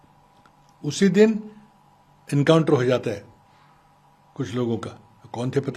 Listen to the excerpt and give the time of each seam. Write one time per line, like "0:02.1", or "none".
none